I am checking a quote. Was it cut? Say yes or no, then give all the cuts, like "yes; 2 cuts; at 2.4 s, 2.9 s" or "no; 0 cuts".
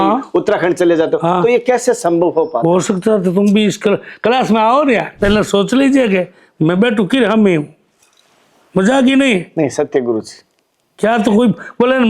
yes; 1 cut; at 5.1 s